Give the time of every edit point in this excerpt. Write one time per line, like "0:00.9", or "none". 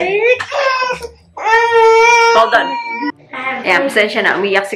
none